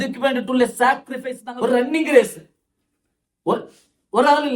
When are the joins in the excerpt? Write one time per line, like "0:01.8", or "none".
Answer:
0:01.4